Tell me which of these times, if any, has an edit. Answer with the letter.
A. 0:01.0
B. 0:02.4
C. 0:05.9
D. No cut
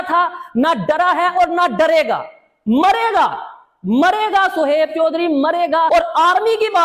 C